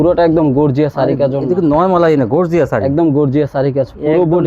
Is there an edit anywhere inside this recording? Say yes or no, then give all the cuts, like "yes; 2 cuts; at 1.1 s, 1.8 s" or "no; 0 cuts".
no; 0 cuts